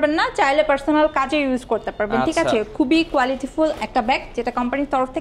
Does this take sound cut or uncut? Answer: uncut